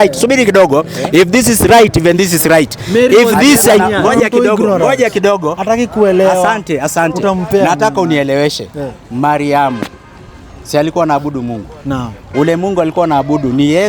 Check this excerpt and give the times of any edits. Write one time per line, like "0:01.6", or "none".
0:03.9